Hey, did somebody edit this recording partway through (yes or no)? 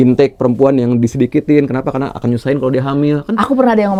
no